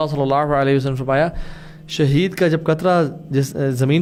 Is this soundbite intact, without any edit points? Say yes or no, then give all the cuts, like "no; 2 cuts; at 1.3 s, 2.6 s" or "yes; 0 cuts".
yes; 0 cuts